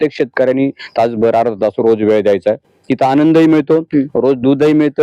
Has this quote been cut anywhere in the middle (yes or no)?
no